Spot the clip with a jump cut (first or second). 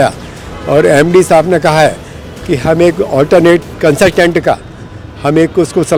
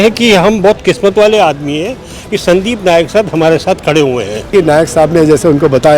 second